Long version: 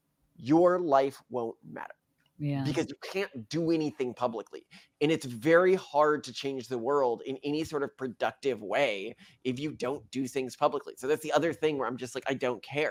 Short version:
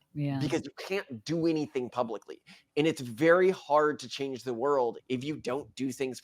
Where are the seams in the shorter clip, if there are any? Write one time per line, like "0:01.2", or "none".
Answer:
0:05.0